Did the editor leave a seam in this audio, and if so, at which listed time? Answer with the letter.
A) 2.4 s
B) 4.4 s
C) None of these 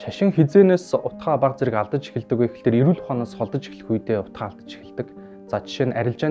C